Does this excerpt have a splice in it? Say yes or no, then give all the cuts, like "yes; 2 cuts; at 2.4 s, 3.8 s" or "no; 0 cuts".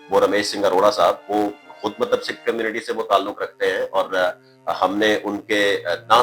no; 0 cuts